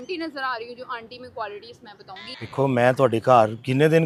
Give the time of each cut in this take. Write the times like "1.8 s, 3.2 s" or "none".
none